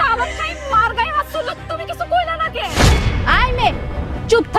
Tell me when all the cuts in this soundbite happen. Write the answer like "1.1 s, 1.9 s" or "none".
none